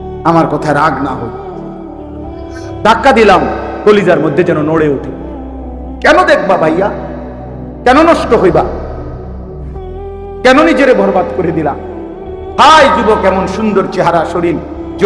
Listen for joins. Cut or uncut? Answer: cut